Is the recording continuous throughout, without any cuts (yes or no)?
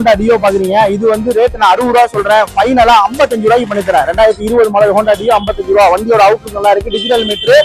yes